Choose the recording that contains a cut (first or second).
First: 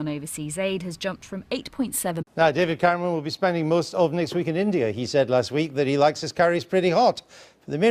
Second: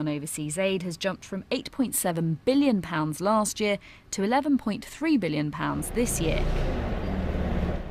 second